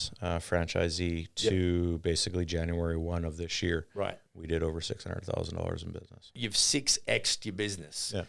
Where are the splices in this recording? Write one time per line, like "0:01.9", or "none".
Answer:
0:06.3